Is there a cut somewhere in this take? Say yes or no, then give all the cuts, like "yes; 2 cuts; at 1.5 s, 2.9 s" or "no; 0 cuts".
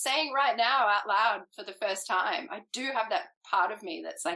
yes; 1 cut; at 3.4 s